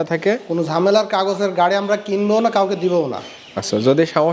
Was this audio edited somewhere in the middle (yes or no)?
no